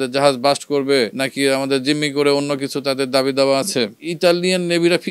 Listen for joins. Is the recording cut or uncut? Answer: cut